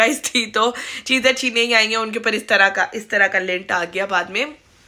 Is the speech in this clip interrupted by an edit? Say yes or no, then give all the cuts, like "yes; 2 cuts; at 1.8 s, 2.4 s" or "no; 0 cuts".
no; 0 cuts